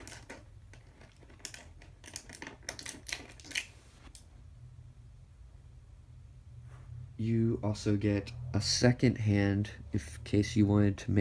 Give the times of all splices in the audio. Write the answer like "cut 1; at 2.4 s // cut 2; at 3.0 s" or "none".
cut 1; at 2.0 s